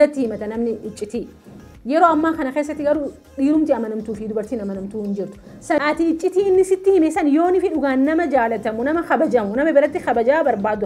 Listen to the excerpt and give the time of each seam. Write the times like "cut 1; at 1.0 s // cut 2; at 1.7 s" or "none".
cut 1; at 5.8 s